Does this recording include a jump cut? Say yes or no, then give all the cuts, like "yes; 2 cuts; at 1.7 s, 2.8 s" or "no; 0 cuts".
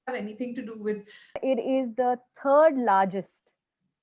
yes; 1 cut; at 1.4 s